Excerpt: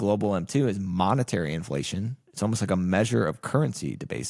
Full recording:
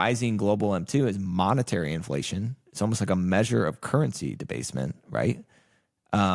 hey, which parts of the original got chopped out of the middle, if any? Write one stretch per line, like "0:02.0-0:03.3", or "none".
none